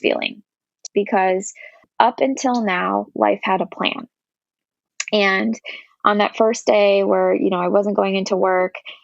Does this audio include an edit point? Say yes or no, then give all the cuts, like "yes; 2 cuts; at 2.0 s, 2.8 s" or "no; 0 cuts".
yes; 2 cuts; at 0.8 s, 1.9 s